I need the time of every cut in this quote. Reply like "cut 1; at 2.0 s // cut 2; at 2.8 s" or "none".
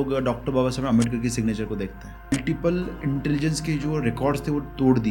cut 1; at 2.3 s